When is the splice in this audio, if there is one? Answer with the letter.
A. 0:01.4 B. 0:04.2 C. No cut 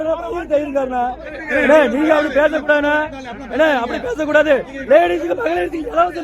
A